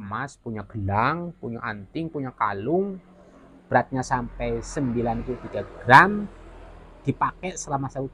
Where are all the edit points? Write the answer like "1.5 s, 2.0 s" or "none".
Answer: none

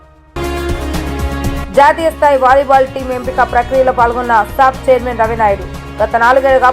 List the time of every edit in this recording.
1.0 s

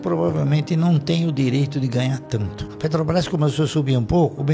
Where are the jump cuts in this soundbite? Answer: 2.7 s

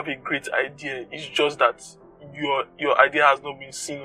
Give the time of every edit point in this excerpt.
none

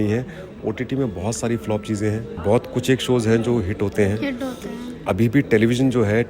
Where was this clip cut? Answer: 2.3 s

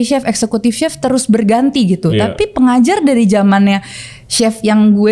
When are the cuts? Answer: none

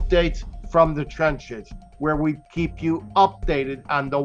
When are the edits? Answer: 2.4 s

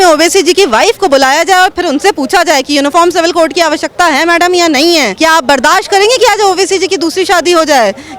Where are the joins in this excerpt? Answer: 5.1 s

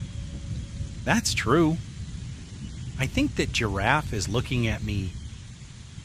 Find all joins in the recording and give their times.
1.0 s

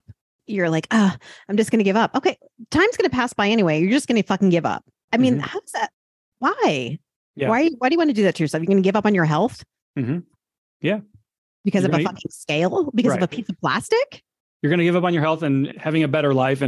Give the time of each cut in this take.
none

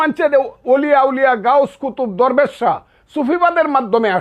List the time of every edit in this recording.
none

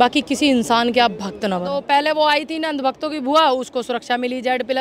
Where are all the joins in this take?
1.8 s

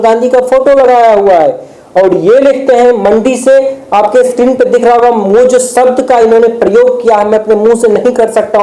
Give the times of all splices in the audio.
none

